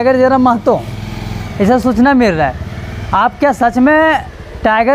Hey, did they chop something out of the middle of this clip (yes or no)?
no